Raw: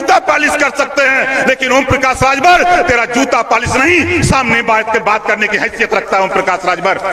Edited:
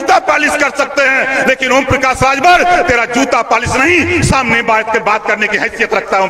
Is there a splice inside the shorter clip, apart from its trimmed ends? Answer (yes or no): no